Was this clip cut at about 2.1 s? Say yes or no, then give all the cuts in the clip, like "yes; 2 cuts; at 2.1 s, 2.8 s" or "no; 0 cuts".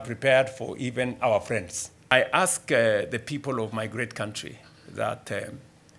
yes; 1 cut; at 2.1 s